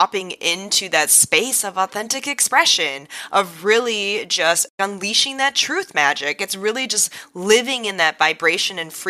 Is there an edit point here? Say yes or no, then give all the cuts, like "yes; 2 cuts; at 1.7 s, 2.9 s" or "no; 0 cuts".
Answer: yes; 1 cut; at 4.7 s